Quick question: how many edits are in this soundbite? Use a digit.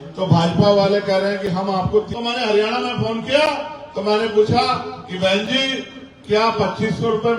1